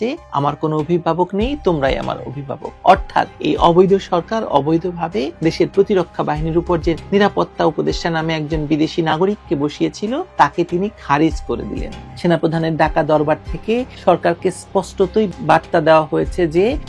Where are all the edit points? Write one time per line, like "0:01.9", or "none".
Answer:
0:11.9